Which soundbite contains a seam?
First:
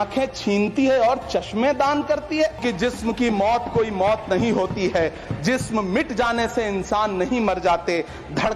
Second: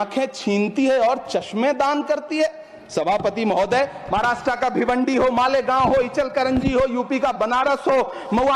first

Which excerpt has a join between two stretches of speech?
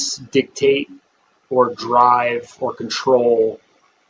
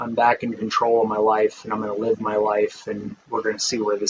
second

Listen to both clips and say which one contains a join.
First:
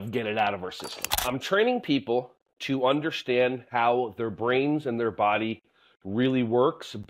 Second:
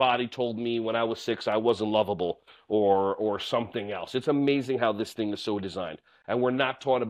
first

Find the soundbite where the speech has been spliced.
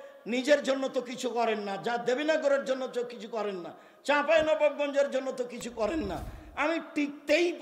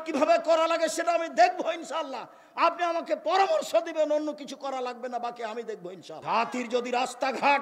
second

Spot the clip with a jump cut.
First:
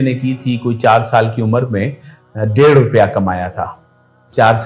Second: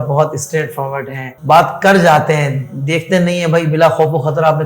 second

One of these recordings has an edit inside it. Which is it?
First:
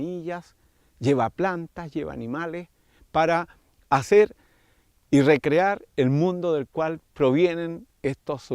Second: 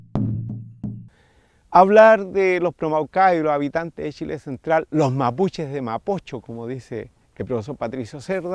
second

